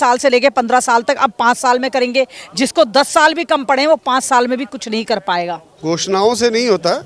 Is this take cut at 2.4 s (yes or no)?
no